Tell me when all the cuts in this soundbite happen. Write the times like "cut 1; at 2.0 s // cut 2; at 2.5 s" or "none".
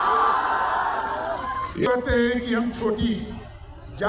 cut 1; at 1.9 s

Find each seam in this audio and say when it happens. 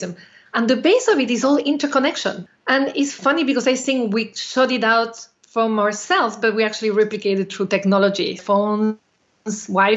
cut 1; at 2.4 s // cut 2; at 8.4 s

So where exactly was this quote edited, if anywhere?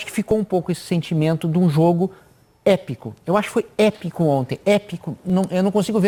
none

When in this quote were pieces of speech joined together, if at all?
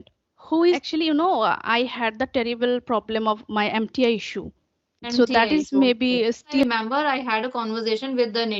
cut 1; at 0.8 s // cut 2; at 6.6 s

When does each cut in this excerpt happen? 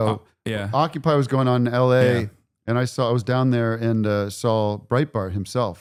none

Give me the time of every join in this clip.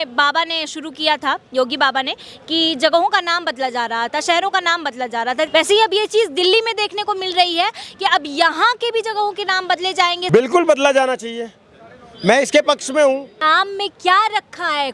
cut 1; at 5.5 s // cut 2; at 10.2 s // cut 3; at 13.3 s

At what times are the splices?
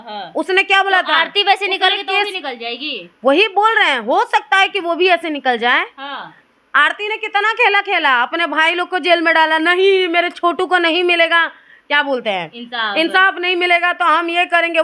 none

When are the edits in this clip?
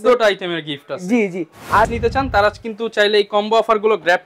cut 1; at 1.9 s

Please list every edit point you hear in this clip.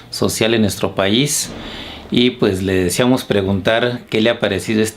cut 1; at 2.9 s

